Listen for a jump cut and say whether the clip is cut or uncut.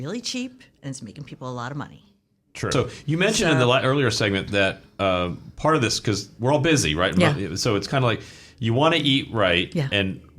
cut